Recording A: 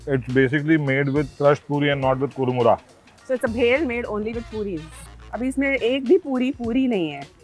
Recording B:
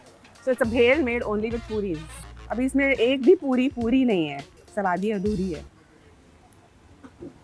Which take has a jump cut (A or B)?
A